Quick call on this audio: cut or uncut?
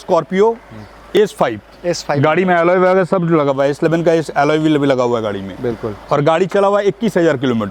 uncut